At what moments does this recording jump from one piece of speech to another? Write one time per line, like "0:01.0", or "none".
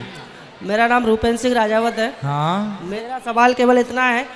0:02.9